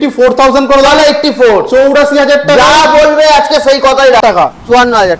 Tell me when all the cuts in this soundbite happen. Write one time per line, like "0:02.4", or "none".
0:04.2